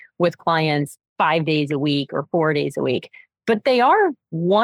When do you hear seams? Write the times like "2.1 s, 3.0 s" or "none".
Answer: 1.0 s